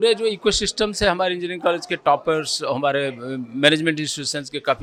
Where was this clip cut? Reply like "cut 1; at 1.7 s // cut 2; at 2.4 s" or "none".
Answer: none